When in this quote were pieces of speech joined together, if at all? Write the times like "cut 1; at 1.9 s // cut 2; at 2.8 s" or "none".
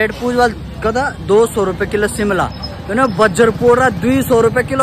none